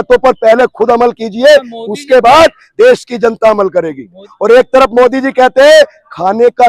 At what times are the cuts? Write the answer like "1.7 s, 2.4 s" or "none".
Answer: 4.3 s